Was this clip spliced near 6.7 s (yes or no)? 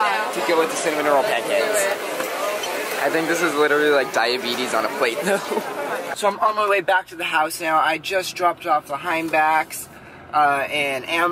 yes